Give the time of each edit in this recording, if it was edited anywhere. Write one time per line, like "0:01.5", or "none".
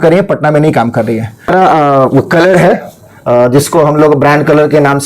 0:01.5